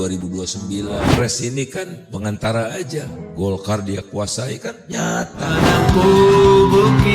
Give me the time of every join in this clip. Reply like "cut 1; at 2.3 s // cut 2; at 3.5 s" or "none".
cut 1; at 1.0 s // cut 2; at 5.6 s